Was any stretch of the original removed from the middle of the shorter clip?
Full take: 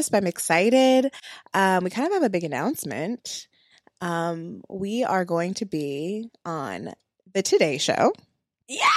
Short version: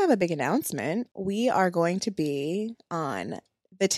yes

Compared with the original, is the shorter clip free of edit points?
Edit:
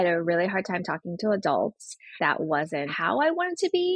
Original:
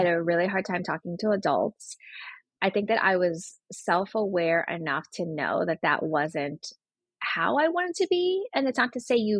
no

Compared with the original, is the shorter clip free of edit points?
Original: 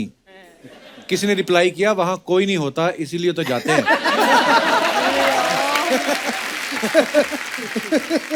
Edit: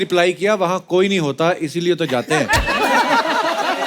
yes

